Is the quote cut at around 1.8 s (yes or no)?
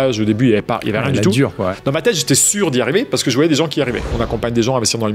yes